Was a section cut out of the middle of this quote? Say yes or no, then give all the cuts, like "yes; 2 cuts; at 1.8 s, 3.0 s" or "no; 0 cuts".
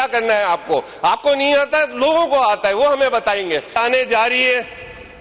yes; 1 cut; at 3.8 s